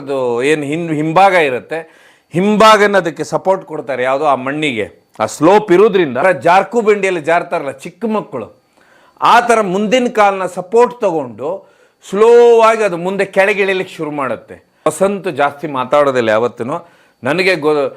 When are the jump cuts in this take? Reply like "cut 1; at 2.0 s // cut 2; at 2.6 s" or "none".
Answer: cut 1; at 6.2 s // cut 2; at 14.9 s